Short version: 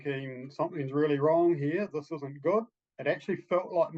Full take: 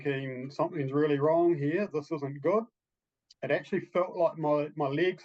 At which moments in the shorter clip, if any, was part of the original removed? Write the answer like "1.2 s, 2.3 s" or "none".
2.8 s